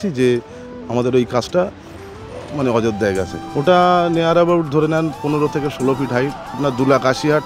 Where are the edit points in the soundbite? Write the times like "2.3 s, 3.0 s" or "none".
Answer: 3.3 s, 6.6 s